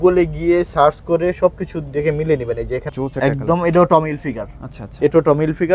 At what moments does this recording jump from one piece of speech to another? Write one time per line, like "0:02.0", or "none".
0:02.9